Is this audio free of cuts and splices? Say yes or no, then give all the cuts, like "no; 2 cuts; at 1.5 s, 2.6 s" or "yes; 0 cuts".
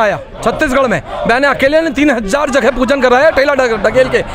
yes; 0 cuts